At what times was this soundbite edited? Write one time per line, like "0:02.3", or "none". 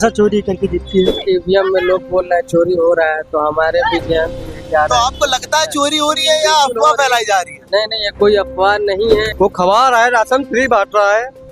0:01.2
0:09.3